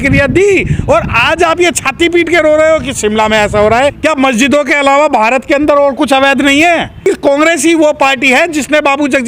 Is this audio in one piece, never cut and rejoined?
no; 2 cuts; at 4.0 s, 7.0 s

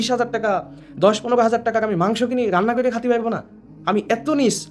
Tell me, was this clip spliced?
no; 0 cuts

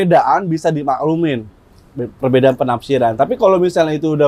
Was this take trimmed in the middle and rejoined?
no; 0 cuts

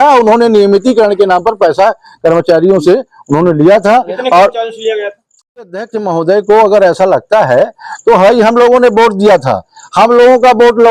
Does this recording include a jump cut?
yes; 1 cut; at 5.6 s

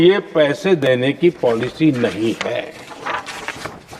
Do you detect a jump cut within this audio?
no; 0 cuts

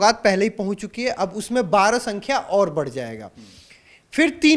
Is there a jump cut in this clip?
no; 0 cuts

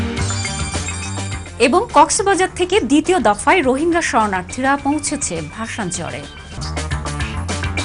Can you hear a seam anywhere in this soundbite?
no; 0 cuts

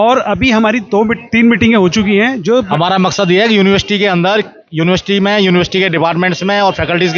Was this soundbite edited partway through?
yes; 1 cut; at 2.7 s

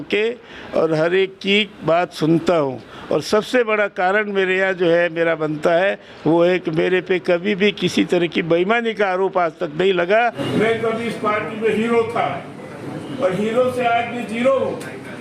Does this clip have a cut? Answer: yes; 1 cut; at 10.2 s

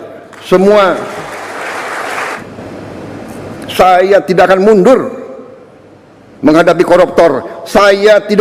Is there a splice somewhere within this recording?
yes; 1 cut; at 2.4 s

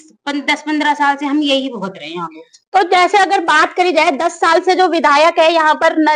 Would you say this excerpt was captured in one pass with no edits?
yes; 0 cuts

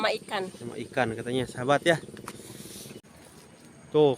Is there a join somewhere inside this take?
yes; 1 cut; at 3.0 s

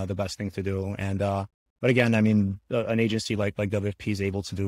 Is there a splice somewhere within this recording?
no; 0 cuts

